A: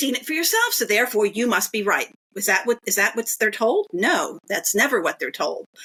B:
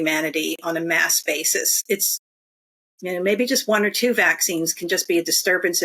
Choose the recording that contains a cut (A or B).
B